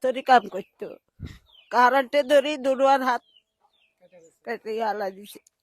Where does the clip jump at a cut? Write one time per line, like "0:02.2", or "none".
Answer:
none